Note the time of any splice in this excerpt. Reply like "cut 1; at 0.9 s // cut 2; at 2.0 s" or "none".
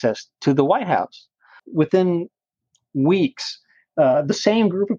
cut 1; at 1.6 s